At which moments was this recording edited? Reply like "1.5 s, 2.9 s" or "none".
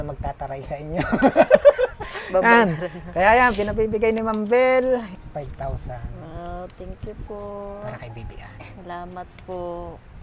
5.2 s